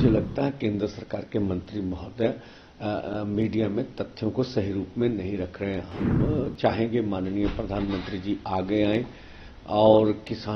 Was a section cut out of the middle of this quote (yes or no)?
no